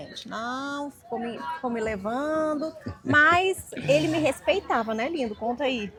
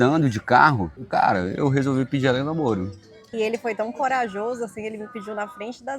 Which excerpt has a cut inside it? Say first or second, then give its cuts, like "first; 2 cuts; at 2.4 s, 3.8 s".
second; 2 cuts; at 1.0 s, 3.1 s